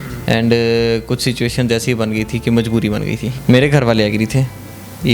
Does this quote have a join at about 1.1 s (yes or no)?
no